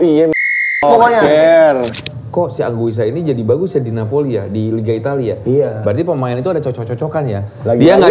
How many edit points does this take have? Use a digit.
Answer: 1